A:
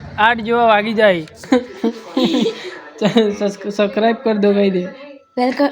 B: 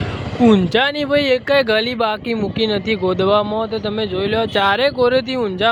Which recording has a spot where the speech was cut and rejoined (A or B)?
A